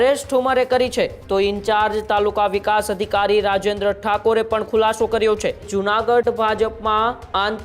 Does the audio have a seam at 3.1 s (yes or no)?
no